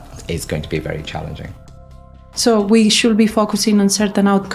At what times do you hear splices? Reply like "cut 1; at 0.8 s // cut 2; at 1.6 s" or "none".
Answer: cut 1; at 1.9 s

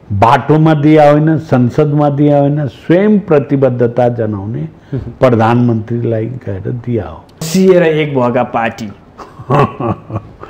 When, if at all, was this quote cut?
cut 1; at 7.4 s

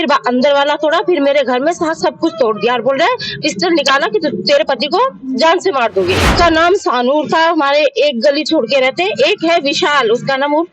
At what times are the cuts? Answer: cut 1; at 6.3 s

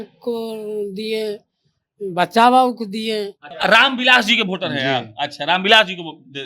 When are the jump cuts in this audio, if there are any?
cut 1; at 3.4 s

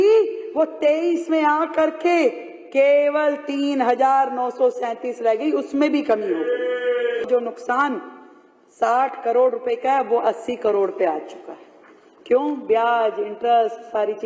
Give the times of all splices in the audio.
cut 1; at 7.3 s

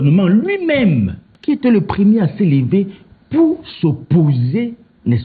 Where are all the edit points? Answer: cut 1; at 1.3 s

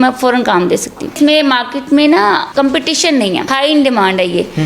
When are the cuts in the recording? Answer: cut 1; at 1.1 s // cut 2; at 2.5 s // cut 3; at 3.5 s

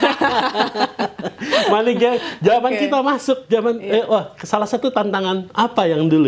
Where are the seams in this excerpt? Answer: none

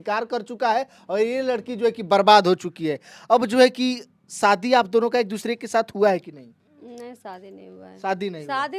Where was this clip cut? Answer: none

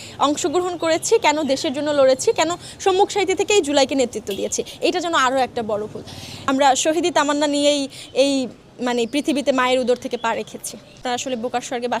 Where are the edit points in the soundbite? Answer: cut 1; at 6.3 s // cut 2; at 11.0 s

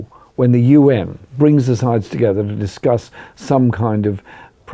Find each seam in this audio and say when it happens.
cut 1; at 1.2 s

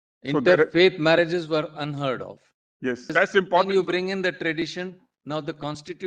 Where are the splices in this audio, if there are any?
cut 1; at 3.1 s

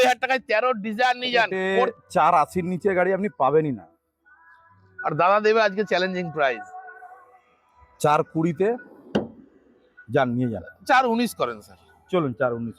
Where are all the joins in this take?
cut 1; at 1.9 s

